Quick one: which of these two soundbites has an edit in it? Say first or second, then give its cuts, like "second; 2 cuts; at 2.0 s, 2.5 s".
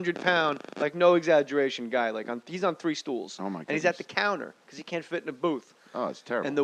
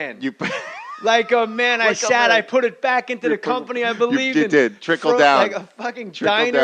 second; 1 cut; at 4.8 s